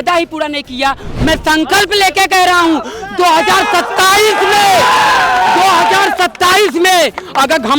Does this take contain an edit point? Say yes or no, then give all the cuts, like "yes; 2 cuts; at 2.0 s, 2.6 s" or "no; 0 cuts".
yes; 1 cut; at 1.1 s